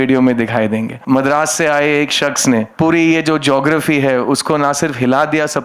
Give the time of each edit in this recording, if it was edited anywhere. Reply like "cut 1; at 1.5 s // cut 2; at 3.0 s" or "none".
cut 1; at 0.9 s // cut 2; at 2.7 s